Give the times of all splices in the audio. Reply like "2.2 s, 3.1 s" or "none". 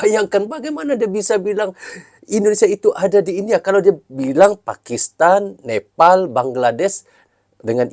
none